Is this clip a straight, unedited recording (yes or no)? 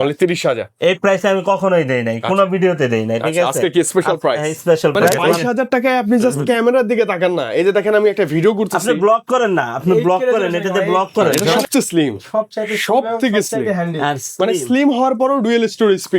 no